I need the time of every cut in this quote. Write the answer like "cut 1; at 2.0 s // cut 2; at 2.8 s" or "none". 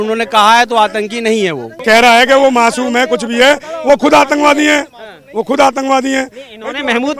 cut 1; at 1.7 s